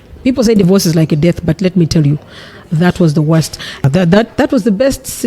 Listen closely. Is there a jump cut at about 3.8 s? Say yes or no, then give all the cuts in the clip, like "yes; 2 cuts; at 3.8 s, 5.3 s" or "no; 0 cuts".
yes; 1 cut; at 3.8 s